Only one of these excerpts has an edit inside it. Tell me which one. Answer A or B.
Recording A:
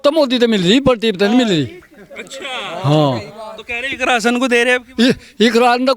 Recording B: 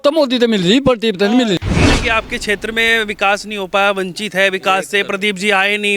B